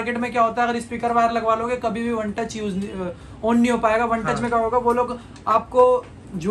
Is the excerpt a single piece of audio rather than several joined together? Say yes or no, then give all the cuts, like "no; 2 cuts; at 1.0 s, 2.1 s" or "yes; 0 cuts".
yes; 0 cuts